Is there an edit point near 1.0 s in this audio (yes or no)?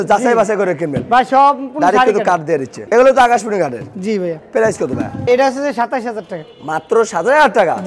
no